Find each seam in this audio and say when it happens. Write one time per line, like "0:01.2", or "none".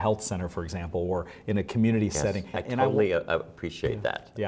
0:02.6